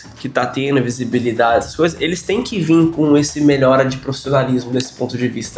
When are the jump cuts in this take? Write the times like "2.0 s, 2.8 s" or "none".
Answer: none